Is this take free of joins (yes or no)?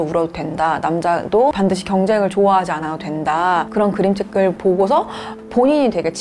no